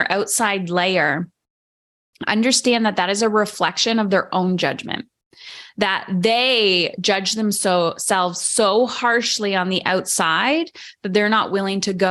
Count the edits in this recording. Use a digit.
0